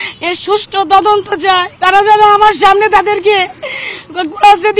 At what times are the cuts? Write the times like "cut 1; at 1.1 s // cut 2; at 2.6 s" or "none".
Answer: cut 1; at 1.7 s